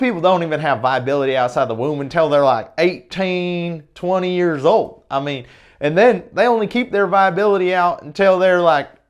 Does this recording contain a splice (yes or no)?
no